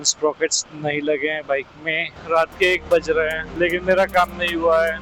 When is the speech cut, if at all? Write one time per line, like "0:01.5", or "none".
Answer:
0:02.1
0:03.4

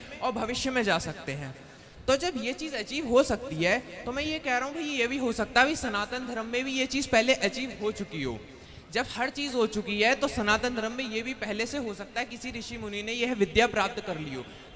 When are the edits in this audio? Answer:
none

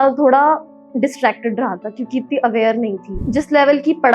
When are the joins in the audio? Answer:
0:03.2

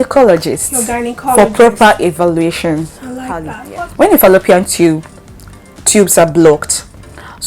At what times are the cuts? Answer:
0:03.6

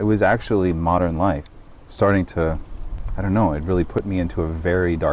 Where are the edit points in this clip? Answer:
0:01.5

